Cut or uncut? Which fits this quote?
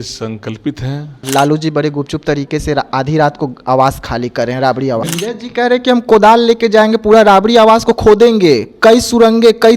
cut